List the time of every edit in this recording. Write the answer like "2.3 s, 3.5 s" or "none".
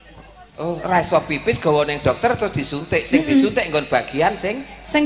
none